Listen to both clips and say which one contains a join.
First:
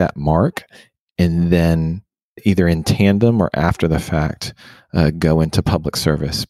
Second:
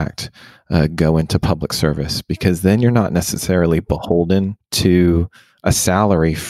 second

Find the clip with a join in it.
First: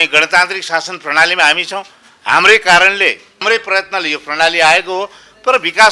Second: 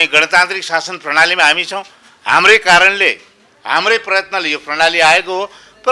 first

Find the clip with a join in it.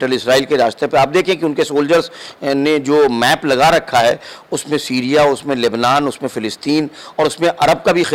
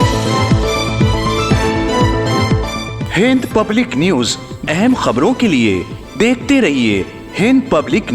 second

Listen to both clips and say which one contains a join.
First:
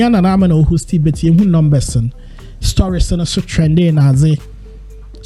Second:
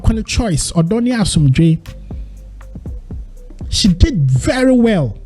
second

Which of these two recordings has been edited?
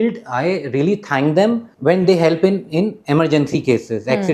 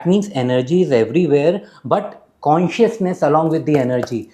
first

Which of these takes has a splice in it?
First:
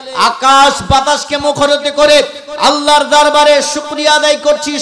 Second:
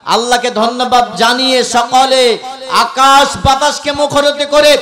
second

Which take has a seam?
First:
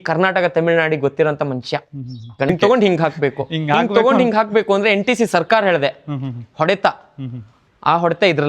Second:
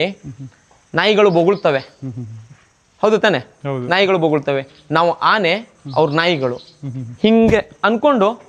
first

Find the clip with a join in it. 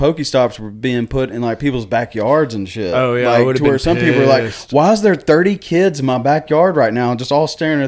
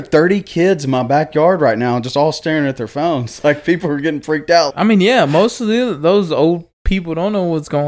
second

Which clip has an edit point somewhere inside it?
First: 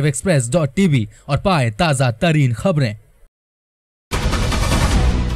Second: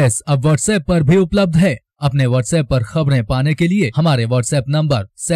first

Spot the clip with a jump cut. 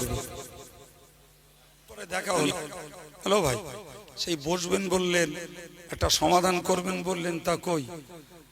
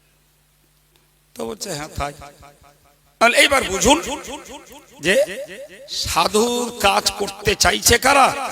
first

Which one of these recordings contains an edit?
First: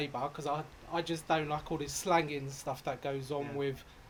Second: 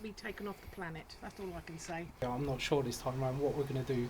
second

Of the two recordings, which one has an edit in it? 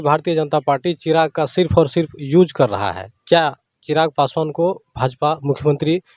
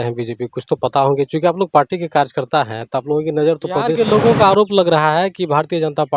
second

